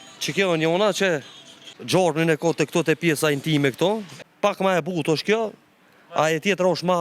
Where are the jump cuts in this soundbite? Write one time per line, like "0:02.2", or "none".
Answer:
0:01.7
0:04.1